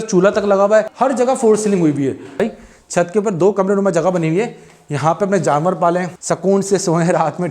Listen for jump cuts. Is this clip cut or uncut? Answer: cut